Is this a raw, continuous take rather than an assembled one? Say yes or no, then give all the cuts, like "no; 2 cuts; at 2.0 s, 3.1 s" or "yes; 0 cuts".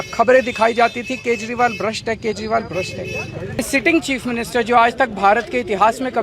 no; 1 cut; at 3.6 s